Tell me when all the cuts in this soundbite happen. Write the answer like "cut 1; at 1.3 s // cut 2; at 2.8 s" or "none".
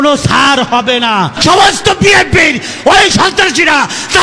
cut 1; at 1.3 s